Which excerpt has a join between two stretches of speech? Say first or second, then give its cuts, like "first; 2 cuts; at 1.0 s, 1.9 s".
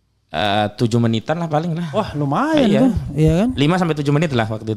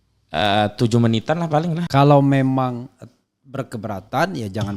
second; 1 cut; at 1.8 s